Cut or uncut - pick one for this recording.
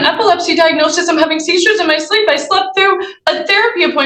uncut